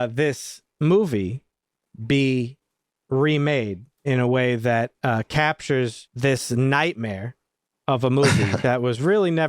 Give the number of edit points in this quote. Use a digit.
1